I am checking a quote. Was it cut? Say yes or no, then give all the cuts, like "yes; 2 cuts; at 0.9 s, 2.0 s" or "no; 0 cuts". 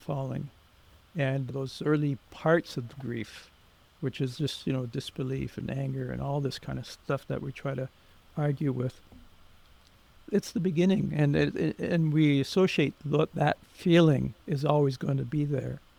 no; 0 cuts